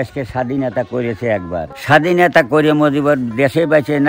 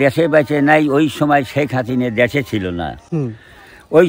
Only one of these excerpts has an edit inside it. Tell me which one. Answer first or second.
first